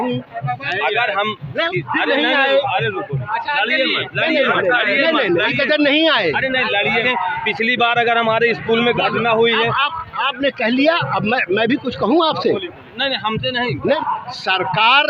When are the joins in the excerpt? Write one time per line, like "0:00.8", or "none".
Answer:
0:07.0
0:14.0

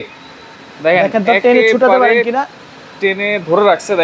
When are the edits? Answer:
none

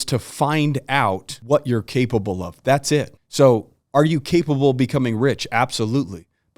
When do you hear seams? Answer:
0:01.3
0:03.2

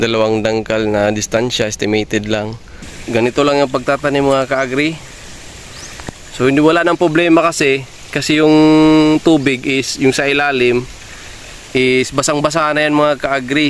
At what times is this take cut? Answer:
0:02.9

